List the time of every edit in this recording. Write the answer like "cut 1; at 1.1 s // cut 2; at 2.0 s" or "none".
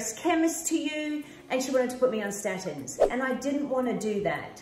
cut 1; at 3.1 s